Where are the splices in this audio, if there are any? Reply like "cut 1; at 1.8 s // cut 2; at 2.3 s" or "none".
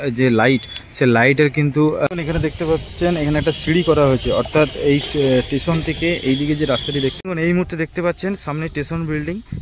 cut 1; at 2.1 s // cut 2; at 7.2 s